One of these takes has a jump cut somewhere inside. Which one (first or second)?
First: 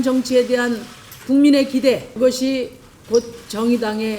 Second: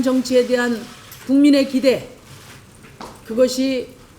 first